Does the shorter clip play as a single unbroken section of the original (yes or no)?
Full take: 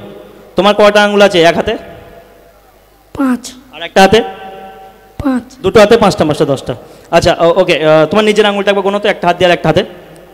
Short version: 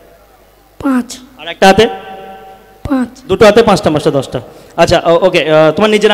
yes